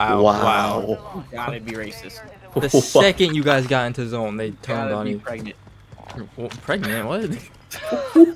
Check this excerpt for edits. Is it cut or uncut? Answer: uncut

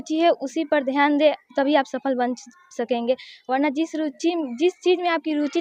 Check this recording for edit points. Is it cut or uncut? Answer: uncut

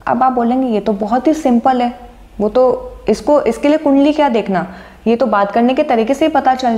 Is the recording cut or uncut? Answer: uncut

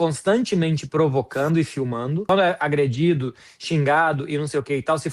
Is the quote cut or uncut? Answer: cut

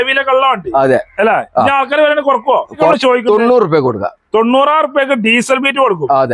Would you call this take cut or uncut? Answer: cut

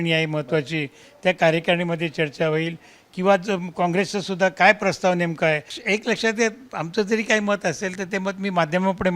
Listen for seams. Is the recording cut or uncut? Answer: cut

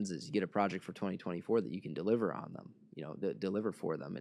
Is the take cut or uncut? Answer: uncut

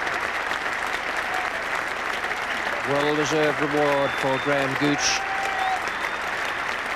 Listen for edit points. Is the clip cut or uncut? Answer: uncut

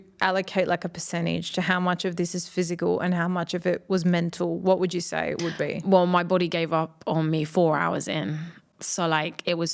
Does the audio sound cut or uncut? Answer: uncut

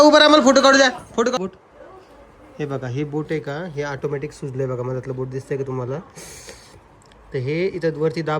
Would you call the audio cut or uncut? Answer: cut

